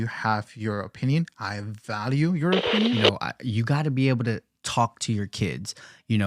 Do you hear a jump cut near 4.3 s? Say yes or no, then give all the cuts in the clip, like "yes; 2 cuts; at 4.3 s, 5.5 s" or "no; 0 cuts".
no; 1 cut; at 3.0 s